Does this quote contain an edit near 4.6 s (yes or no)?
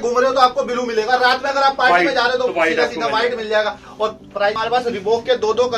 yes